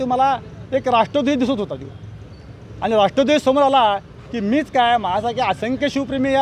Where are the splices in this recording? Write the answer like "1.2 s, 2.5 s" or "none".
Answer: none

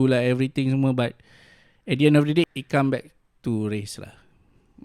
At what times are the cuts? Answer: 2.5 s

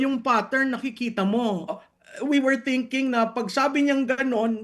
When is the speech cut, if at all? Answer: 1.7 s

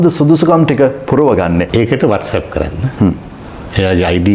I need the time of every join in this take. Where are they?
1.7 s

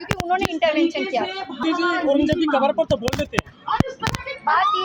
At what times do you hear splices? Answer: 1.6 s

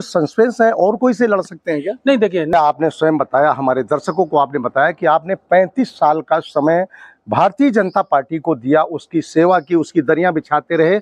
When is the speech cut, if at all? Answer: 2.5 s

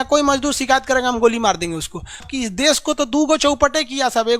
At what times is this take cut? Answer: 2.3 s

